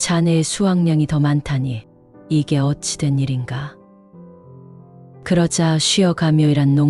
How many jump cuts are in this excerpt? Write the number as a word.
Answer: two